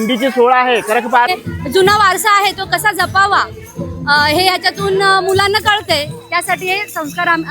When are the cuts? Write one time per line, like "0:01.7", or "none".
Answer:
0:01.3